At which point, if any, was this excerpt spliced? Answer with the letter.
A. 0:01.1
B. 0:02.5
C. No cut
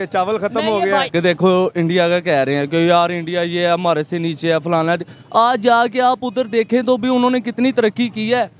A